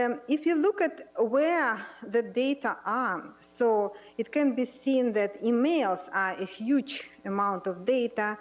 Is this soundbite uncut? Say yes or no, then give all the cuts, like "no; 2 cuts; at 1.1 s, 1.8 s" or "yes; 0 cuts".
no; 1 cut; at 5.1 s